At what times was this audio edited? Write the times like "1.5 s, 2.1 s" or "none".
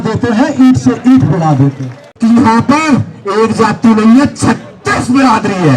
2.1 s